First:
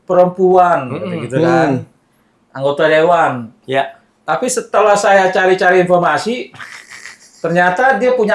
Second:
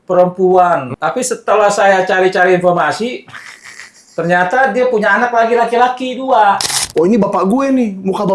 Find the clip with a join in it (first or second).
second